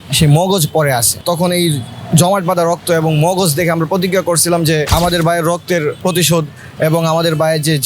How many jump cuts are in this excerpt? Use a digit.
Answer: 3